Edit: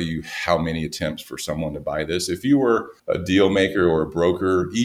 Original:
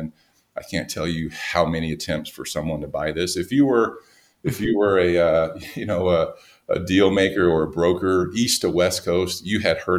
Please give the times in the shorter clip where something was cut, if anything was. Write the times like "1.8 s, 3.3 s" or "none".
2.9 s